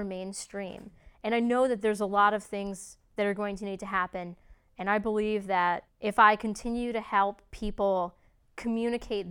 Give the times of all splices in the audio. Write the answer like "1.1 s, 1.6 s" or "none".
5.9 s